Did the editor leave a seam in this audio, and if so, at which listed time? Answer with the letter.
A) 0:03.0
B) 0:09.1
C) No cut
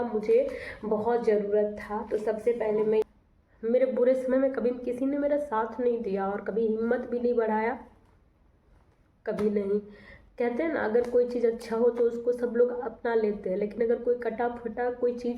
A